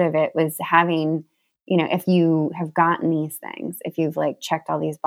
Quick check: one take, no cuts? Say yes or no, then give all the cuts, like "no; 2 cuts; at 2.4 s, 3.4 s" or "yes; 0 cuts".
yes; 0 cuts